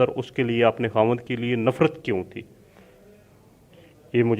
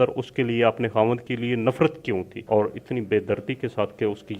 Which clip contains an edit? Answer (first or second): second